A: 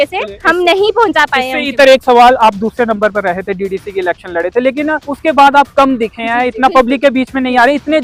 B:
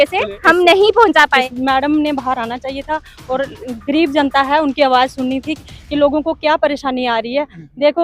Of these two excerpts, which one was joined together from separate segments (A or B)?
B